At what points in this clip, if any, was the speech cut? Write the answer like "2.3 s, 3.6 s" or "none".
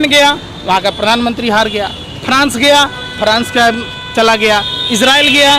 none